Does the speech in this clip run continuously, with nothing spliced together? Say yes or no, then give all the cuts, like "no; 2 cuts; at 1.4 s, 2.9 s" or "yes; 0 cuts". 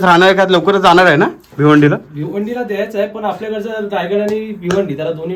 yes; 0 cuts